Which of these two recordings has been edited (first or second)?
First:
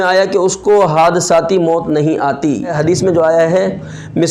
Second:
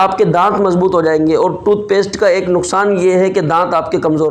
first